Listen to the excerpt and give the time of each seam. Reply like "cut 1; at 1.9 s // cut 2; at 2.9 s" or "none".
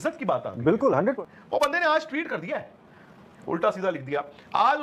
cut 1; at 1.2 s // cut 2; at 3.3 s